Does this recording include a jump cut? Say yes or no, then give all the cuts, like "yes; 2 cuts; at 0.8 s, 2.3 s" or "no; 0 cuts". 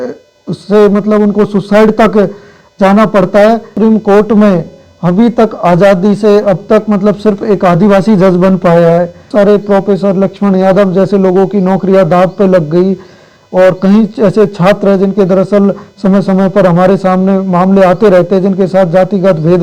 yes; 2 cuts; at 3.7 s, 9.3 s